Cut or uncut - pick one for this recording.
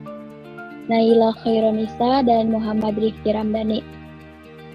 cut